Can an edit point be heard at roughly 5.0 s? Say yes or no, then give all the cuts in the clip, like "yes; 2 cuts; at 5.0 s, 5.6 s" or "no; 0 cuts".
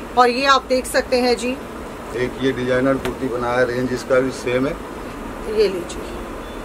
yes; 1 cut; at 5.0 s